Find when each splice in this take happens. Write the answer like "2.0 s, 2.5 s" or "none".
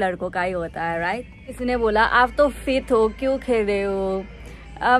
1.6 s